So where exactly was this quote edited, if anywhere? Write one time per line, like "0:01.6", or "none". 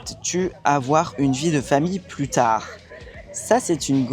none